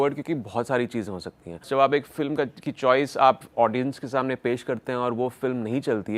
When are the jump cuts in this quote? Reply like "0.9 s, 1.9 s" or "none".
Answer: 1.7 s